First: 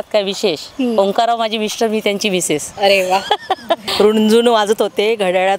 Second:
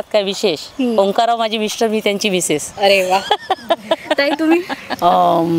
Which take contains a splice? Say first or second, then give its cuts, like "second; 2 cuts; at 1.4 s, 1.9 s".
first; 1 cut; at 3.9 s